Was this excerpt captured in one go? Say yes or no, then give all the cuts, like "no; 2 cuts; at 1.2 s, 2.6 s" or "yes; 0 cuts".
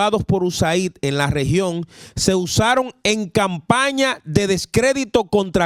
yes; 0 cuts